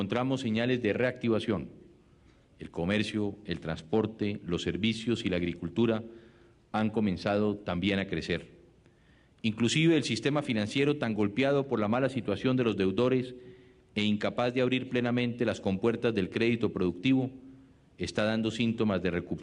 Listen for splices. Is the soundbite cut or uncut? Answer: cut